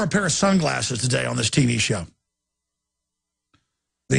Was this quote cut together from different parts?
yes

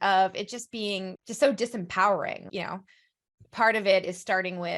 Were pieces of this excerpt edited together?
yes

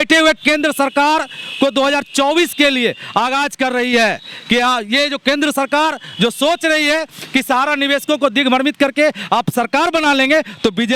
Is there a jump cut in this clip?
no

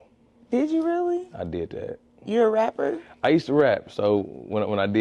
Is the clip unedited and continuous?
yes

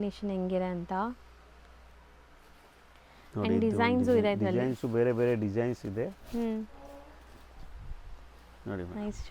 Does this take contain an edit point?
no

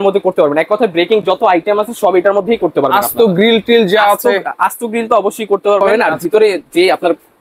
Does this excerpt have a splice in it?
yes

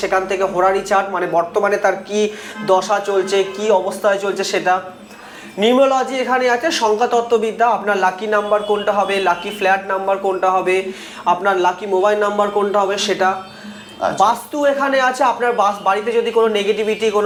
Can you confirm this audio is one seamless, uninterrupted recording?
yes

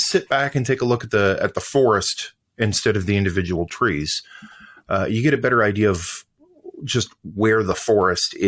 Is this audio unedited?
yes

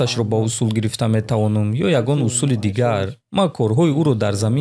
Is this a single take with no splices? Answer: yes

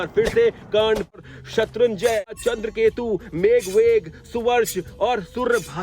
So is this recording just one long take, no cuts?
no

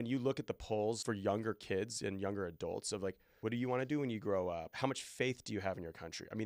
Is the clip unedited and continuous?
no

